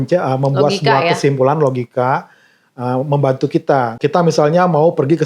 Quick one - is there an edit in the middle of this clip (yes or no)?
no